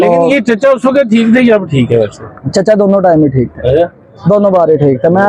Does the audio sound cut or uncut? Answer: uncut